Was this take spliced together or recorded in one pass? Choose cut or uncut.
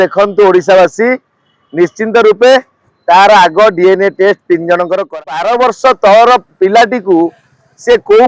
cut